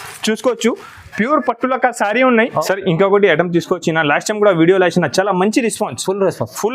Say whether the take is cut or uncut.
cut